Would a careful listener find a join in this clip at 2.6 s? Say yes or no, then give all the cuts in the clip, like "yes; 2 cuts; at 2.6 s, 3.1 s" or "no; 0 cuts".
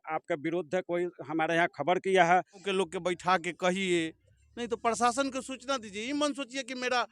yes; 1 cut; at 2.6 s